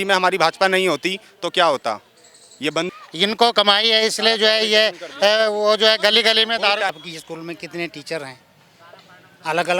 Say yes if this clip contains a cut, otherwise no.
yes